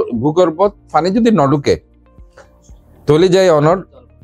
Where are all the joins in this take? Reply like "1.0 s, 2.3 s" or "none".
none